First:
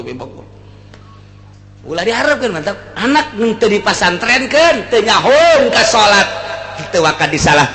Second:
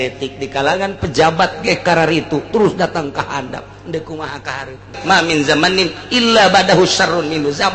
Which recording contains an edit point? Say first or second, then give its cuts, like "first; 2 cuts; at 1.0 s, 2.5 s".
second; 1 cut; at 4.9 s